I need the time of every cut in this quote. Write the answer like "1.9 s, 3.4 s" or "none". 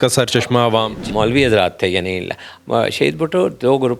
1.1 s

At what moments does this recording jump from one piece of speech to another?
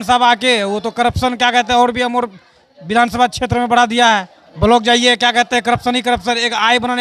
4.4 s

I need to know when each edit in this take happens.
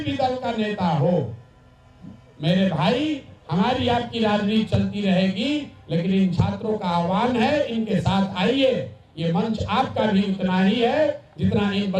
none

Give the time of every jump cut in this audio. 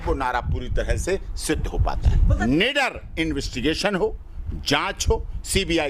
2.3 s

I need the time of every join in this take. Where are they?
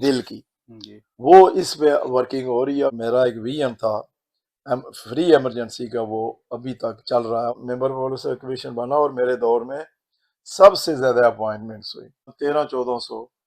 2.9 s, 7.6 s

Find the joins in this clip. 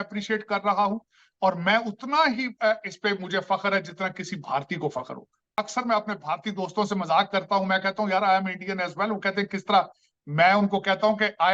5.5 s

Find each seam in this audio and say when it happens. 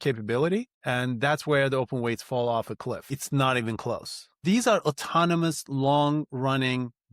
3.1 s, 4.4 s

